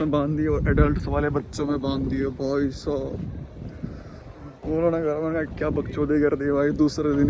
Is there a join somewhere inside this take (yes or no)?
no